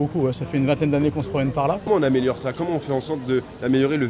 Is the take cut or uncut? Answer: cut